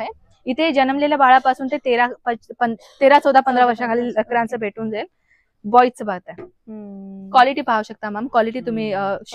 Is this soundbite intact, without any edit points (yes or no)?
yes